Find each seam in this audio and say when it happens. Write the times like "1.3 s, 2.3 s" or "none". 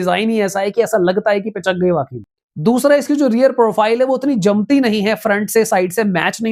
none